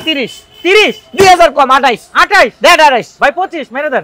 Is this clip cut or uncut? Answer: uncut